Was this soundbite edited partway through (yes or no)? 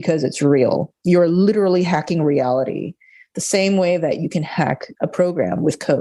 yes